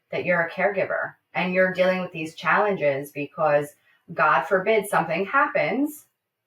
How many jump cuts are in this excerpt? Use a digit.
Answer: 0